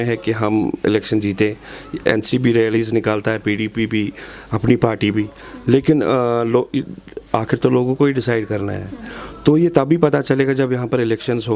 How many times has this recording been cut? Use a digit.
0